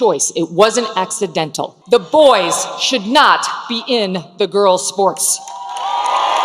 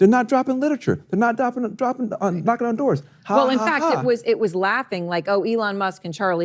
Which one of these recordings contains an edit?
first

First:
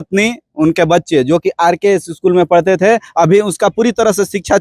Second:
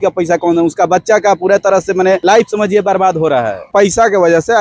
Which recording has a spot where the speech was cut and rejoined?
second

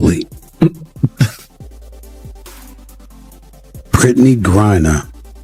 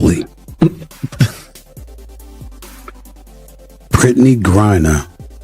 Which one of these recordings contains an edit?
second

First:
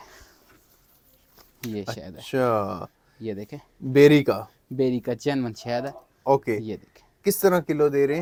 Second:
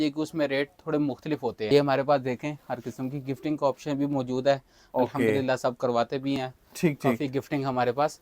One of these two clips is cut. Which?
second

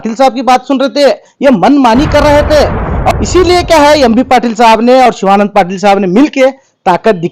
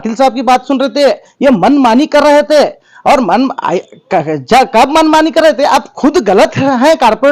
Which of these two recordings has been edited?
first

